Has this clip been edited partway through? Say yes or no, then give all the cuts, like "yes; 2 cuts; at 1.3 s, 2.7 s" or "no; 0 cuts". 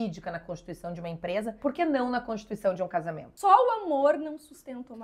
yes; 2 cuts; at 1.6 s, 3.2 s